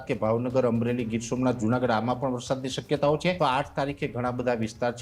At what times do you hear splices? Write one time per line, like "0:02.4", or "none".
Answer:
0:03.4